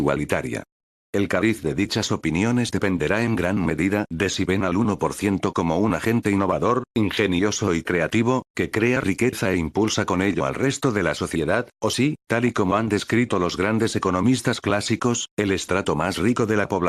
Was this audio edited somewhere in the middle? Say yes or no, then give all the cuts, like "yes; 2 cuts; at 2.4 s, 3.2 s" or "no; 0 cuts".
yes; 1 cut; at 13.5 s